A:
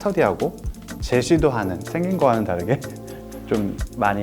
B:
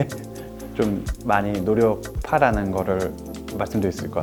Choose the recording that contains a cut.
A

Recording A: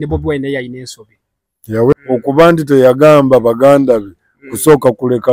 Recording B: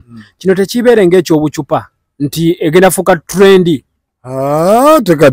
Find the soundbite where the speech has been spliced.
A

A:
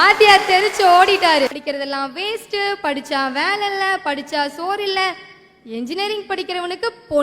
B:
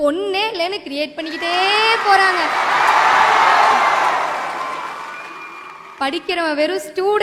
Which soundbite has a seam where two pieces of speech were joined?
A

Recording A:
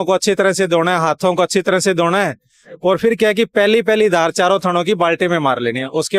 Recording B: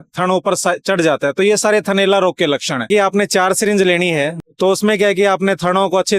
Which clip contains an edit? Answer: B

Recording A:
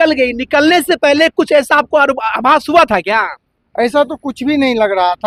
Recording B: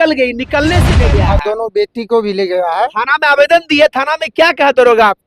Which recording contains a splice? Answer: B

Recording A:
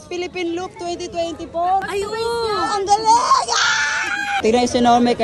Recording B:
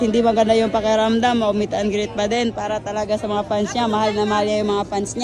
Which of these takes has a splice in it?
A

